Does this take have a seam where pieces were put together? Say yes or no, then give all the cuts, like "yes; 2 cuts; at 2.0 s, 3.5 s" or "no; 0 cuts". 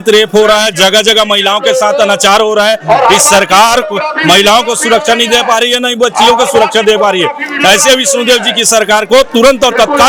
no; 0 cuts